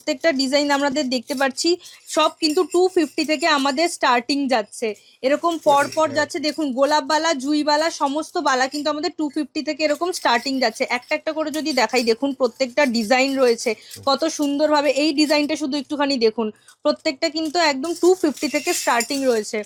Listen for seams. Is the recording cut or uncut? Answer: uncut